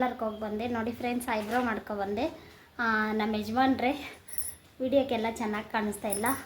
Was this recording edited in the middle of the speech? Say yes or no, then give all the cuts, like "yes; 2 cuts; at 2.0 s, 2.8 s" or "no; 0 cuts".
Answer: no; 0 cuts